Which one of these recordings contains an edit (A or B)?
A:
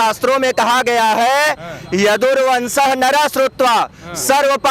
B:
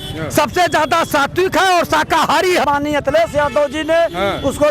B